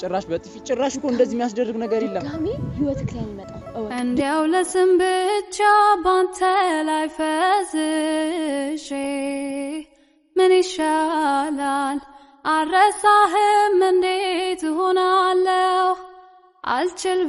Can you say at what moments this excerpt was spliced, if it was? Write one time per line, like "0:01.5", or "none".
none